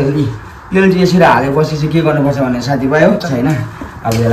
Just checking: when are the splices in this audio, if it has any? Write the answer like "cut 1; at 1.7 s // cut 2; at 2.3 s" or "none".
cut 1; at 3.3 s